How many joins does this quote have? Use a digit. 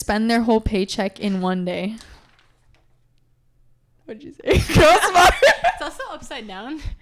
0